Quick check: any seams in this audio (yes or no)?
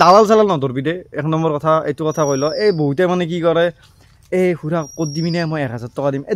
no